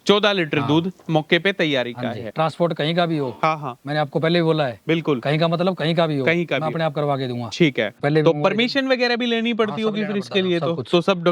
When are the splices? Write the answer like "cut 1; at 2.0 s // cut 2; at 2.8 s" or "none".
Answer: cut 1; at 2.3 s // cut 2; at 7.9 s